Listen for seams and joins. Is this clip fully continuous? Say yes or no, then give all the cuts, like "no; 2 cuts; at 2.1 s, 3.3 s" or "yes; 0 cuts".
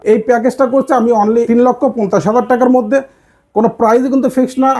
no; 1 cut; at 1.5 s